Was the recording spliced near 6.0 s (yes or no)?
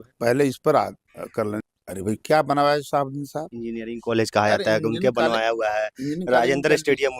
no